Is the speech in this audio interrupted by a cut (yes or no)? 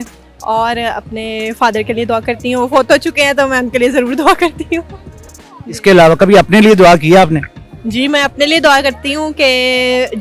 no